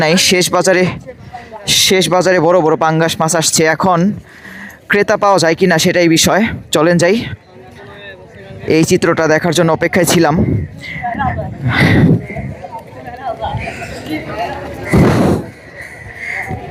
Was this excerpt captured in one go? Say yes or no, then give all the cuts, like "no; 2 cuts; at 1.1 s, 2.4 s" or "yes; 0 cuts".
yes; 0 cuts